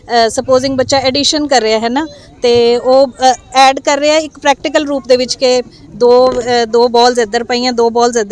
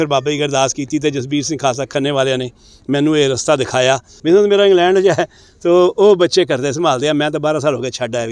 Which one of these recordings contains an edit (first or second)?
second